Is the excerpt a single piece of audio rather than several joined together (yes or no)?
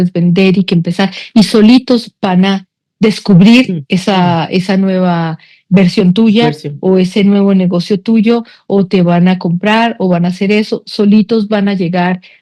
yes